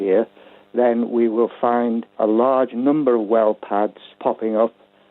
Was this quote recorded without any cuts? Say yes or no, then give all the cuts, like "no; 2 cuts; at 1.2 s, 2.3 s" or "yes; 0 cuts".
no; 2 cuts; at 2.1 s, 4.2 s